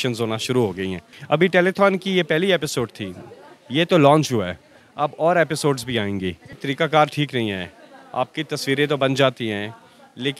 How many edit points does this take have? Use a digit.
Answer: 2